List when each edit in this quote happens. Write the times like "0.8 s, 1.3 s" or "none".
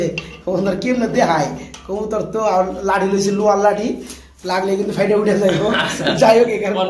none